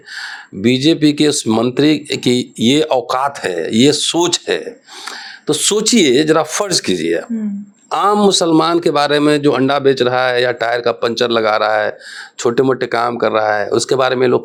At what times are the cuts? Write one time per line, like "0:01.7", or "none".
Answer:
none